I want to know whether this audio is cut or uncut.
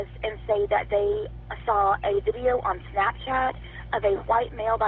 uncut